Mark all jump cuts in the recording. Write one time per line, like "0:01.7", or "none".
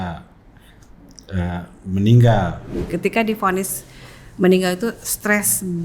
0:02.7